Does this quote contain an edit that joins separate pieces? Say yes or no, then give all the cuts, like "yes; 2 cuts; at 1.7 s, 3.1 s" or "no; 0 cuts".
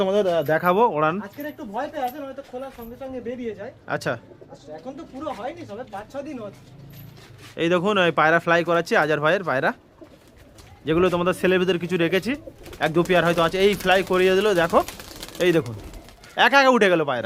no; 0 cuts